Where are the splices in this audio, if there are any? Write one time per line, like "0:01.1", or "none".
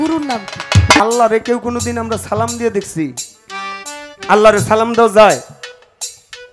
0:01.0